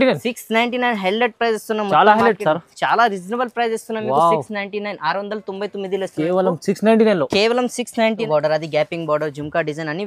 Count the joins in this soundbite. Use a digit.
1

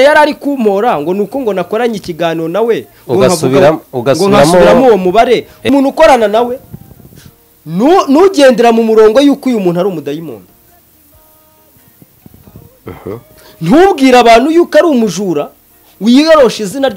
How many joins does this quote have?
1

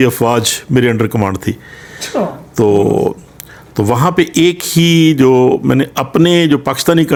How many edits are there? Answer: 0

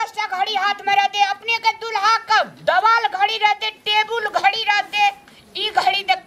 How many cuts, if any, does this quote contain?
0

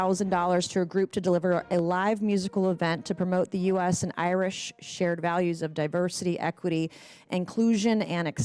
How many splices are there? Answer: 0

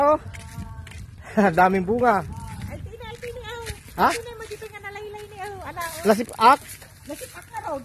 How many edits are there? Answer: 0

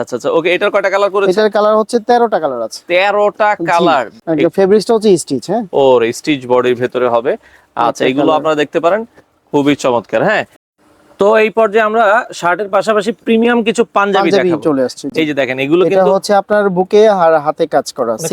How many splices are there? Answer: 2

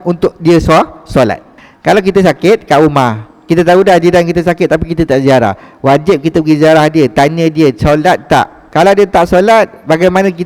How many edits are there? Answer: 1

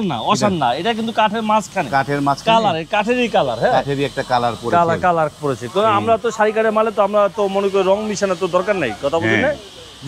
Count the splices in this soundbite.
0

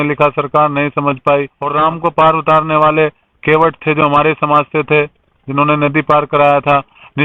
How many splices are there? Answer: 1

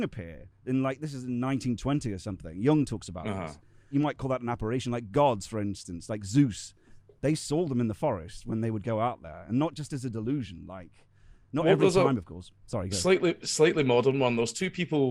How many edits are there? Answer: 1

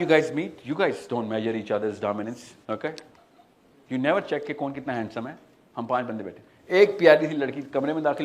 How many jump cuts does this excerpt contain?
1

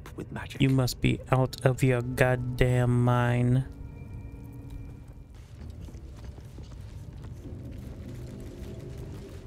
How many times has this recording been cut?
1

